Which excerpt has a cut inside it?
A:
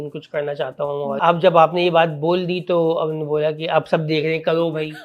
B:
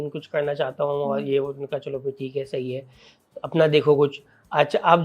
A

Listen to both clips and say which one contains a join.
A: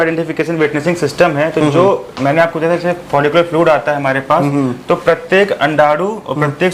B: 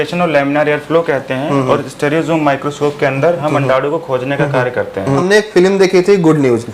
B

